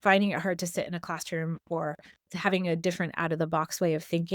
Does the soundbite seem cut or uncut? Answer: cut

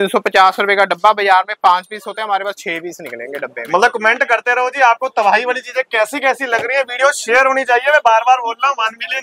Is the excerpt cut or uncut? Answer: uncut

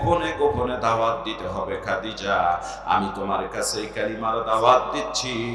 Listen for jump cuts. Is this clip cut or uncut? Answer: uncut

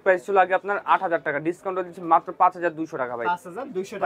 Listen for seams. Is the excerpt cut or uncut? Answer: uncut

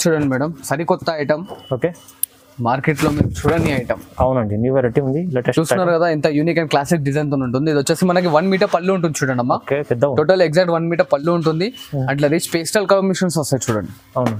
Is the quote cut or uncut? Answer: uncut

